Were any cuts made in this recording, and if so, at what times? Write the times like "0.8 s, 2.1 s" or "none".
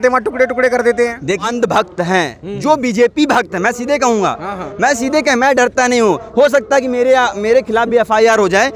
1.4 s